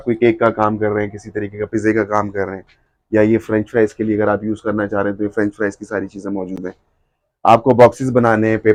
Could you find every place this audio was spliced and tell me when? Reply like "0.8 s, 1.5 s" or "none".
none